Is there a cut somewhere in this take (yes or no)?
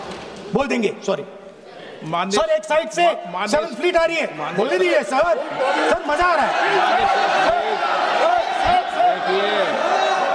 no